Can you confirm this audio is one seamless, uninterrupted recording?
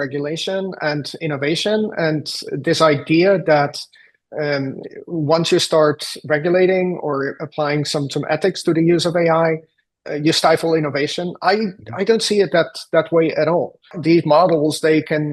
no; 1 cut; at 14.0 s

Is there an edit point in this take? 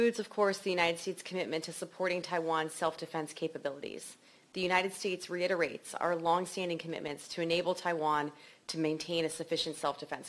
no; 0 cuts

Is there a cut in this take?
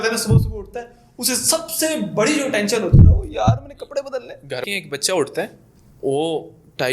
yes; 1 cut; at 4.6 s

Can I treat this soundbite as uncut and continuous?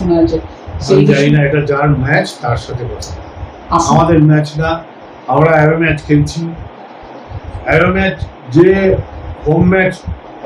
yes; 0 cuts

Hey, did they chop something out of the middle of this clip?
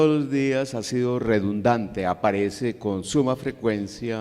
yes; 1 cut; at 3.0 s

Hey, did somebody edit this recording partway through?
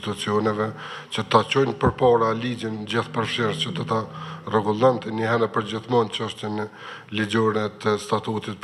no; 0 cuts

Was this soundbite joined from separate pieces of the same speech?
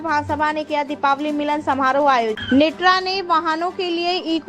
yes; 1 cut; at 2.4 s

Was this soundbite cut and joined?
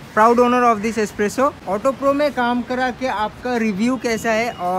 yes; 1 cut; at 1.6 s

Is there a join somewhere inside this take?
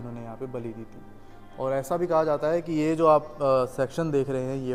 no; 0 cuts

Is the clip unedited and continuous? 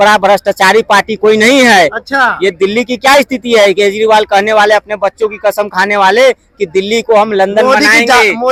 yes; 0 cuts

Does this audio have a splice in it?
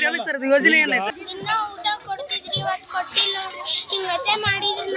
yes; 1 cut; at 1.2 s

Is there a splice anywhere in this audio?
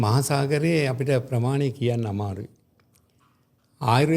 no; 0 cuts

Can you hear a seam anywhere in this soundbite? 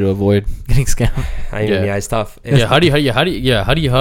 no; 0 cuts

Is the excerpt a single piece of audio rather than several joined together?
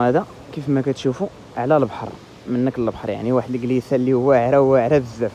yes; 0 cuts

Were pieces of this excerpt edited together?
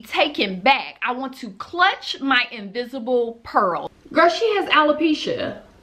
yes; 1 cut; at 4.0 s

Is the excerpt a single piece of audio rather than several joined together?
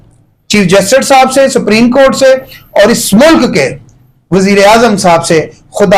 yes; 0 cuts

